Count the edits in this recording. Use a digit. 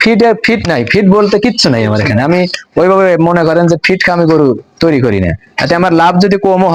0